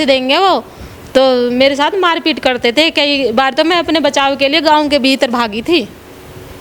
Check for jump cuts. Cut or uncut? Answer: uncut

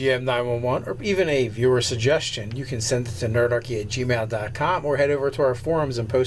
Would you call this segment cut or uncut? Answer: uncut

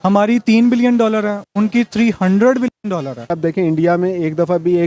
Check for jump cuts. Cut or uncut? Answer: cut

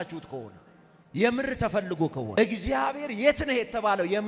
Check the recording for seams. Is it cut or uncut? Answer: cut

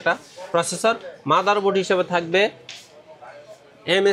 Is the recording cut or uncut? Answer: uncut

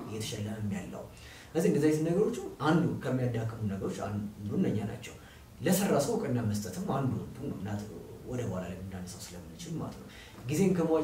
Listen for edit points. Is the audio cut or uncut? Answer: uncut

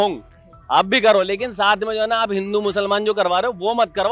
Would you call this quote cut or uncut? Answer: uncut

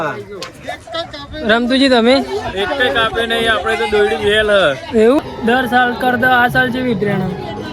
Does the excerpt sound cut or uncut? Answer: cut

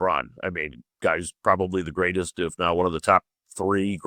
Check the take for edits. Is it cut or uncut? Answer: uncut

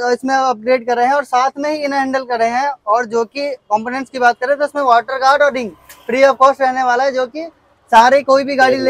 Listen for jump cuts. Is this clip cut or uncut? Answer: uncut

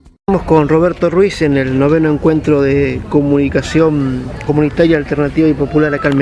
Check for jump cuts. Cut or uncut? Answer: cut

